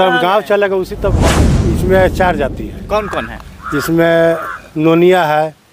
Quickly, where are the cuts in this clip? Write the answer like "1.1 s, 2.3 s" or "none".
1.3 s